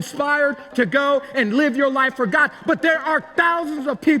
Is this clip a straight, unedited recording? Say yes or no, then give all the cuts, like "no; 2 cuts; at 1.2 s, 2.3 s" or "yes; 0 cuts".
yes; 0 cuts